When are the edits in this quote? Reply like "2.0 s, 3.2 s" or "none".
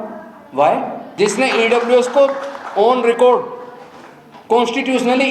1.0 s

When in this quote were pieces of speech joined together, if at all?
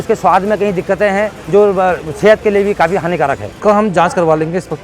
1.4 s, 3.5 s

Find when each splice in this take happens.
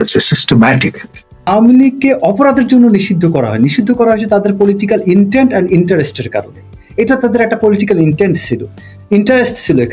1.5 s

